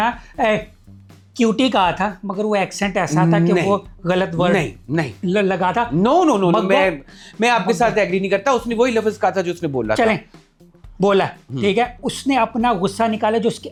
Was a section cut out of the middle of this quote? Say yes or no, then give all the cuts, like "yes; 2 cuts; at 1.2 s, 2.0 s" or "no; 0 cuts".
no; 0 cuts